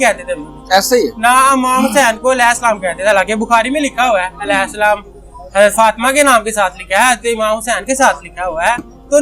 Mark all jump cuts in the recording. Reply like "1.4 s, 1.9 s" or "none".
none